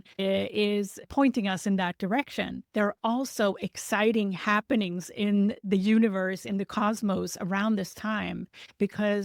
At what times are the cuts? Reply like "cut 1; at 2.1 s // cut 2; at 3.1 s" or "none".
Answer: cut 1; at 2.8 s